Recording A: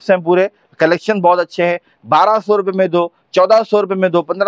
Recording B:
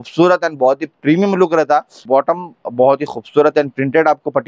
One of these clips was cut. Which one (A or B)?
B